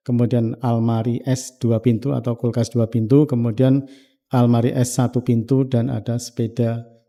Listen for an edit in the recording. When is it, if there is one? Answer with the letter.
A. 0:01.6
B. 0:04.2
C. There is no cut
C